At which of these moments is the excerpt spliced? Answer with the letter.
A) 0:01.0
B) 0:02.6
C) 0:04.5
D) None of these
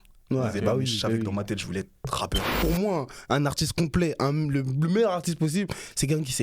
B